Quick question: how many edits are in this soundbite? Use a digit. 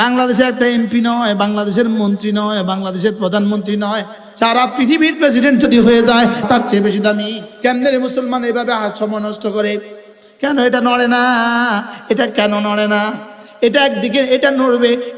2